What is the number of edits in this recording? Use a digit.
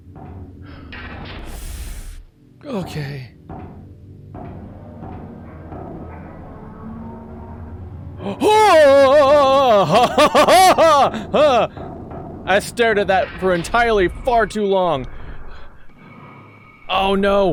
0